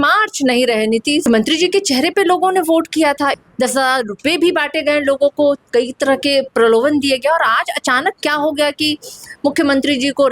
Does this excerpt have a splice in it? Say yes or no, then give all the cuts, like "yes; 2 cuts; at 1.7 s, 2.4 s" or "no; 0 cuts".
yes; 2 cuts; at 1.2 s, 3.4 s